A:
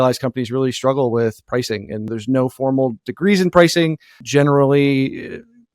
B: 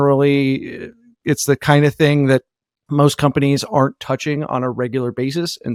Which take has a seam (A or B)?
A